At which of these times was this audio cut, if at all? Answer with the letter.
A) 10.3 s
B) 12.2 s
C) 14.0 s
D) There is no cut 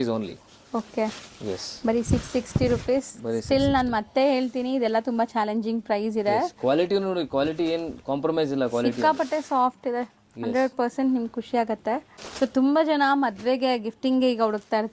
B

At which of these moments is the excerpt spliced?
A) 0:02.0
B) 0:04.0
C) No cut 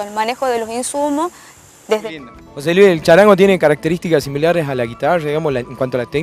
A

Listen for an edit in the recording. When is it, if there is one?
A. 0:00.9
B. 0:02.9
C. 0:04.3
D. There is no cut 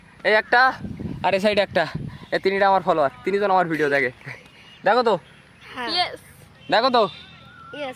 D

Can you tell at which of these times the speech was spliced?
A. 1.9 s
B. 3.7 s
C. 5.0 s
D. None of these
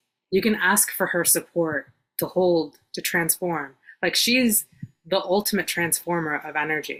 D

